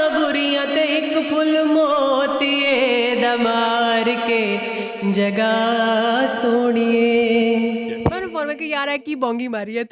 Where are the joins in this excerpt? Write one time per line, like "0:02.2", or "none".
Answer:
0:08.0